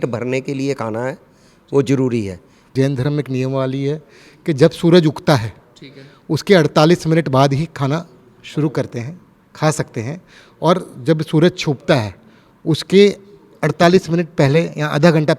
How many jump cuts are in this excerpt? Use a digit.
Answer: 1